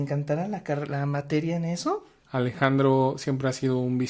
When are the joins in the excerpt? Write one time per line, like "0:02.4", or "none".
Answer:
0:02.2